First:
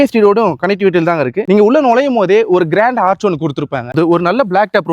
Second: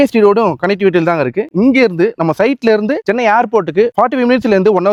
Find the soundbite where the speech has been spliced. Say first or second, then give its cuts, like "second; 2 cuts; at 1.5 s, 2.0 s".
first; 2 cuts; at 1.4 s, 3.9 s